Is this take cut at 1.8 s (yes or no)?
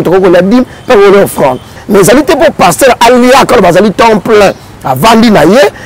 yes